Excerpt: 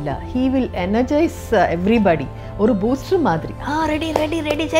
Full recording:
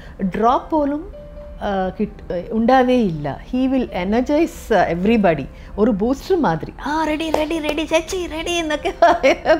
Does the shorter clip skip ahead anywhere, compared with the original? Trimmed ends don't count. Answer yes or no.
no